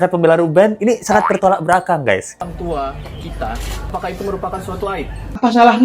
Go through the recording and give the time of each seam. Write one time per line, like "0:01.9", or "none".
0:02.3
0:03.9